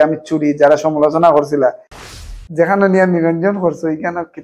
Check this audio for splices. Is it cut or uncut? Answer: cut